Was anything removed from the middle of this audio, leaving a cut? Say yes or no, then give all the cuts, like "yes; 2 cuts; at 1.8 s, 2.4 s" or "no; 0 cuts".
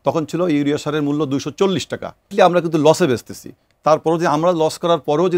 yes; 1 cut; at 2.3 s